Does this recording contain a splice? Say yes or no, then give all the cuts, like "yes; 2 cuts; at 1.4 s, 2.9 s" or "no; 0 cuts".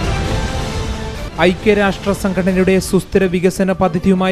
no; 0 cuts